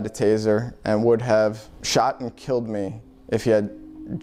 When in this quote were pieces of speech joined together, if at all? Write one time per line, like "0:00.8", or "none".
0:01.7